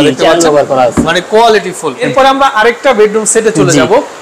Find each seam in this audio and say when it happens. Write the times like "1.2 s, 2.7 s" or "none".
2.0 s